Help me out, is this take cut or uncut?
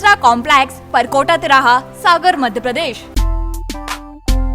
cut